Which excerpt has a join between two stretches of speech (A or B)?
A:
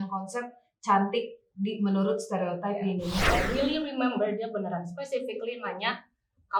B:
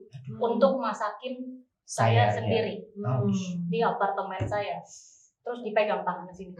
A